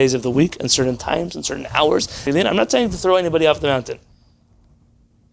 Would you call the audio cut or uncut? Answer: cut